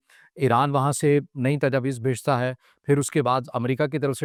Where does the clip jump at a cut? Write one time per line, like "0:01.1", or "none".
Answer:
none